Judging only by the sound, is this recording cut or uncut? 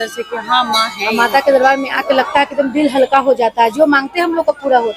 cut